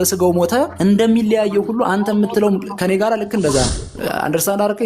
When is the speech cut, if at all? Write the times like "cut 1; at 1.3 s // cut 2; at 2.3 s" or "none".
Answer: cut 1; at 3.9 s